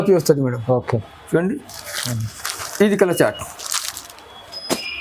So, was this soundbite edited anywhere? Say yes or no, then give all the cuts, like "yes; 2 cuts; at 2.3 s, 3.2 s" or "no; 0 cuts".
no; 0 cuts